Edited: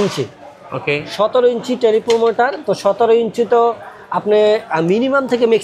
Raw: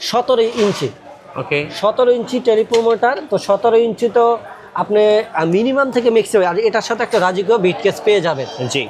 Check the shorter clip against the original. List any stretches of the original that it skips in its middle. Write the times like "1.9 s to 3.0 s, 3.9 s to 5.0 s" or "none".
none